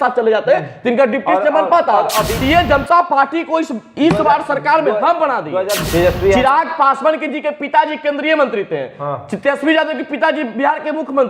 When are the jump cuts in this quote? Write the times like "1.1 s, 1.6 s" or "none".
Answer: 2.4 s, 5.8 s